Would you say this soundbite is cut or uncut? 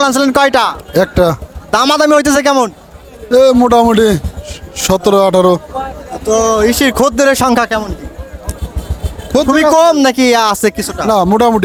uncut